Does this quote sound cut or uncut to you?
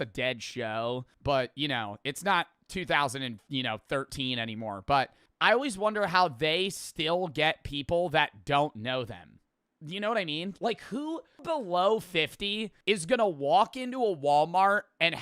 cut